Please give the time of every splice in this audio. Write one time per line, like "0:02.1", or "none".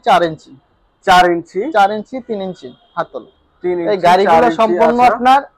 none